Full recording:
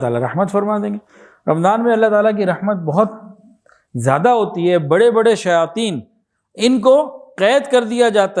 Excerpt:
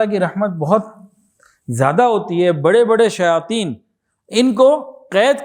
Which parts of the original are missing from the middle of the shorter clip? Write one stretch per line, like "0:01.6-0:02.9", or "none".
none